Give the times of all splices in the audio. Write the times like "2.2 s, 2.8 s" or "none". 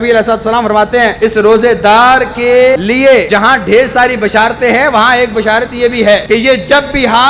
1.1 s, 3.3 s, 6.2 s

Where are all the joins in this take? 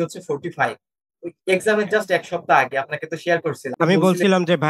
3.7 s

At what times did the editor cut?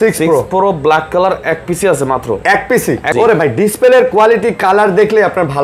3.1 s

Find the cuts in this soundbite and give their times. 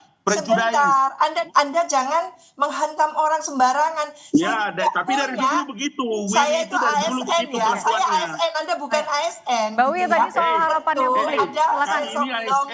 1.4 s

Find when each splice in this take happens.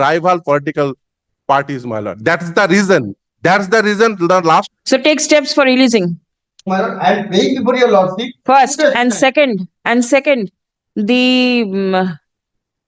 4.7 s

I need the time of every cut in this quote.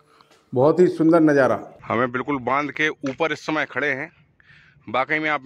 1.7 s

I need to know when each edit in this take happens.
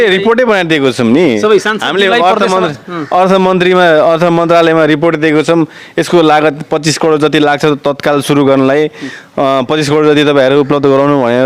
none

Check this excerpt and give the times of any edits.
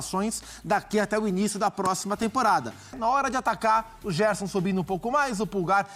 2.9 s

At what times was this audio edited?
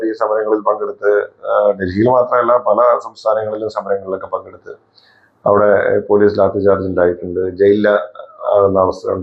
none

